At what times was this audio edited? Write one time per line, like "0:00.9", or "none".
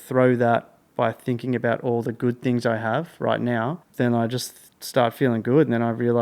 0:03.8